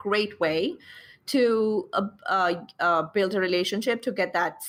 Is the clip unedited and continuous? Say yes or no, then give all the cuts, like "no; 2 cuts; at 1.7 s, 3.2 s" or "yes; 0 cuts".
yes; 0 cuts